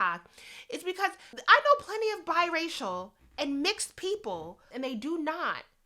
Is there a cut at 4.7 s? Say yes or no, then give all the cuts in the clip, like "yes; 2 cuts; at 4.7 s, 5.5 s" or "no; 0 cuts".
yes; 1 cut; at 4.7 s